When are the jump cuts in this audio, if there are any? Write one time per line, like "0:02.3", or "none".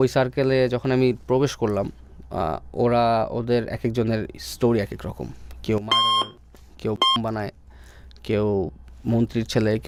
none